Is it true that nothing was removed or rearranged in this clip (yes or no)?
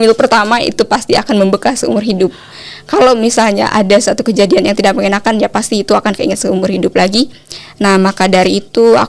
yes